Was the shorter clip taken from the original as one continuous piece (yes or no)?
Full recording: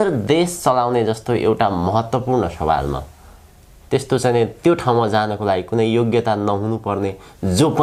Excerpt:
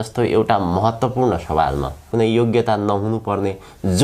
no